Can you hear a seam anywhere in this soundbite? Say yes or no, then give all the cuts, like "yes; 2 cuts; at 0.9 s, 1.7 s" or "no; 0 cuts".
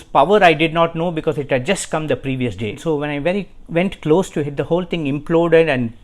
yes; 1 cut; at 2.8 s